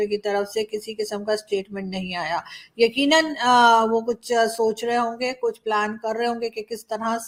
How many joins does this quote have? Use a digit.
0